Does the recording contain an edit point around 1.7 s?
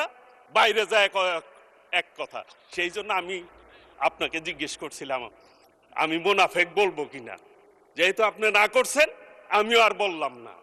no; 0 cuts

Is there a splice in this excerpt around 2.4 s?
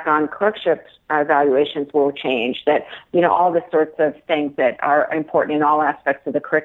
no; 0 cuts

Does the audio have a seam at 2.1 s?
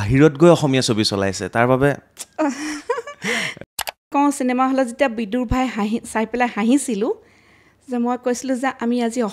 no; 1 cut; at 4.1 s

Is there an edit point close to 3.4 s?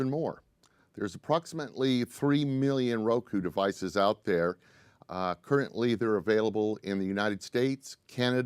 no; 1 cut; at 7.0 s

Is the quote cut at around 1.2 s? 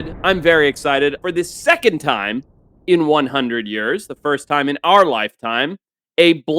yes; 1 cut; at 1.2 s

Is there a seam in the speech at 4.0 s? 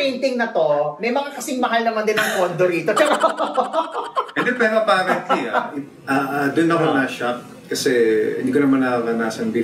no; 0 cuts

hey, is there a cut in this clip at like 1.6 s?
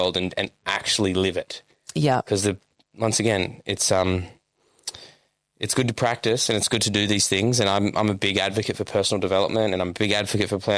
no; 0 cuts

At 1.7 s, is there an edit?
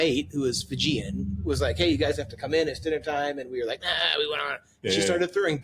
no; 0 cuts

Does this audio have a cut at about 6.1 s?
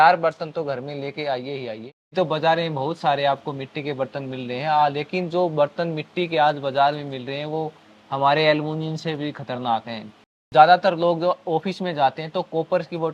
no; 2 cuts; at 2.1 s, 10.4 s

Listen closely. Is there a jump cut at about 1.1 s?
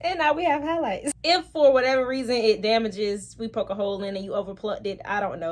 yes; 1 cut; at 1.1 s

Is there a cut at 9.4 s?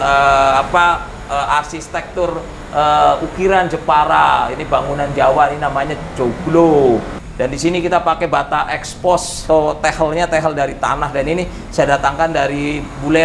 yes; 2 cuts; at 7.2 s, 9.4 s

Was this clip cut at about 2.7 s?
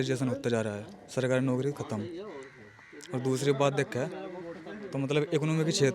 no; 0 cuts

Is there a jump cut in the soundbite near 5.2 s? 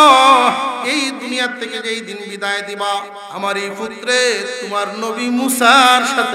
no; 1 cut; at 3.2 s

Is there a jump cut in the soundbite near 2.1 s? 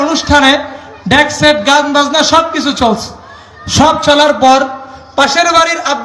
no; 0 cuts

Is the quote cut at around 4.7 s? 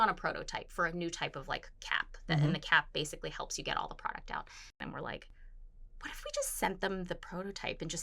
yes; 1 cut; at 4.7 s

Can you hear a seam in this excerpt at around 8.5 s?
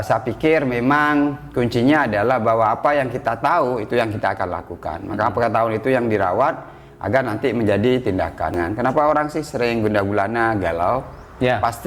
yes; 1 cut; at 8.5 s

